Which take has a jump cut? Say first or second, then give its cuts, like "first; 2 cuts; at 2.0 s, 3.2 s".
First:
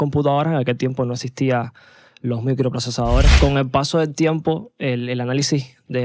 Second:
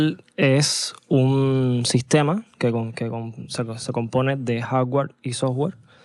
first; 1 cut; at 3.3 s